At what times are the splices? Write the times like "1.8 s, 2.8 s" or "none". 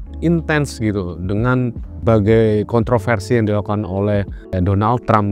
2.0 s, 4.5 s